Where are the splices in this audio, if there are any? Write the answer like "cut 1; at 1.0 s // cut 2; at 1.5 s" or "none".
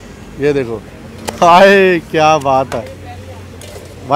none